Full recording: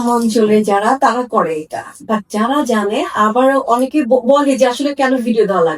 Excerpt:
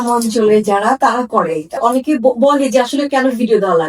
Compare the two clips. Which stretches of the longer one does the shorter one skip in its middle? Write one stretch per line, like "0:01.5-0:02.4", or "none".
0:01.8-0:03.6